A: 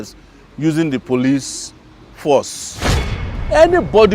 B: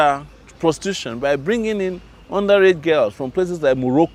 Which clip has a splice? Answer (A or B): A